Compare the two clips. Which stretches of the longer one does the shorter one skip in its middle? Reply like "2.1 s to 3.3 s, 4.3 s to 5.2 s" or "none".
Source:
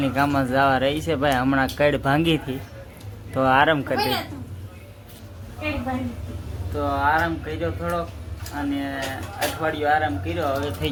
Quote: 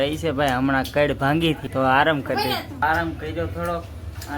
2.5 s to 3.3 s, 4.4 s to 7.1 s